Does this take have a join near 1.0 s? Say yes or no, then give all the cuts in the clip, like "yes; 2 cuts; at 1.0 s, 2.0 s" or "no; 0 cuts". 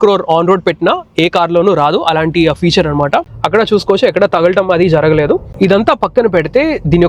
no; 2 cuts; at 3.3 s, 5.5 s